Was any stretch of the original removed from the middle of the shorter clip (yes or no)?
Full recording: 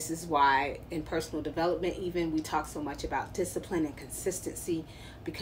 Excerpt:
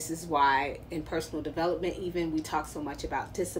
no